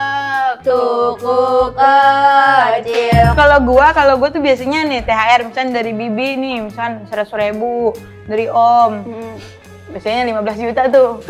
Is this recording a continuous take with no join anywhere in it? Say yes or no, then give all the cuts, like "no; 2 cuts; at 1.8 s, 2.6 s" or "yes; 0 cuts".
no; 1 cut; at 3.3 s